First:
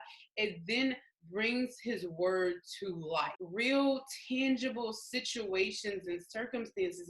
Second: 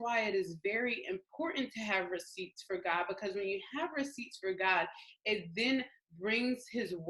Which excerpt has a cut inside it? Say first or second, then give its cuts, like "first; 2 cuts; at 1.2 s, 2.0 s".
first; 1 cut; at 3.4 s